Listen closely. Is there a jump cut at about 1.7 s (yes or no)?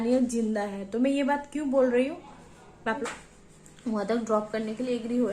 no